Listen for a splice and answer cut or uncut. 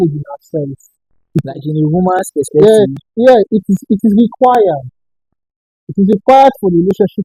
uncut